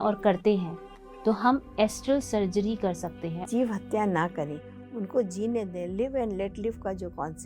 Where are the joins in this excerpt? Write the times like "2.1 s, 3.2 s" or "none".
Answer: 3.5 s